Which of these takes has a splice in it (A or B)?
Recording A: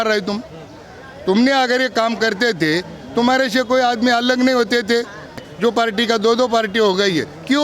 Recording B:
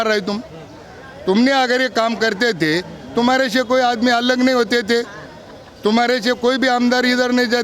A